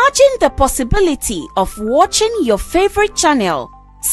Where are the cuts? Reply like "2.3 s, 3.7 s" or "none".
1.1 s